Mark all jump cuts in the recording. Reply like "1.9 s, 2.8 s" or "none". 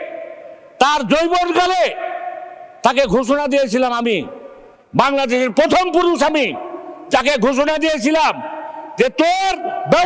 none